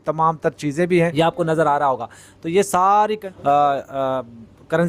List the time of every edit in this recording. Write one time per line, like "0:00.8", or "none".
0:01.1
0:03.3